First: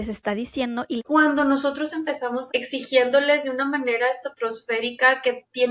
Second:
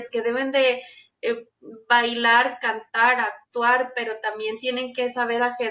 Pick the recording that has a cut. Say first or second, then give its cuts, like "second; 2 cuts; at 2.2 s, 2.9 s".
first; 2 cuts; at 1.0 s, 2.4 s